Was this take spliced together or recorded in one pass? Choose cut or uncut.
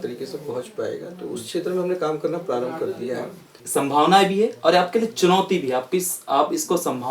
cut